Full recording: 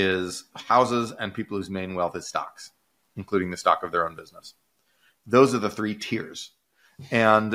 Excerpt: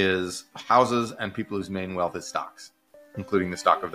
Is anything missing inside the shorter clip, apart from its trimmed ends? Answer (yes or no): no